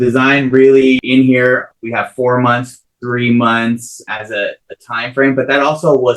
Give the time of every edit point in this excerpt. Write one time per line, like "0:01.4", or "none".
0:01.0
0:01.8
0:04.0